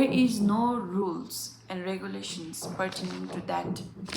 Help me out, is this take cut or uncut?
uncut